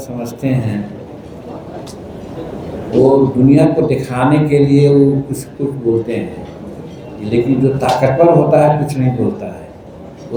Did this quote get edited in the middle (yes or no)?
no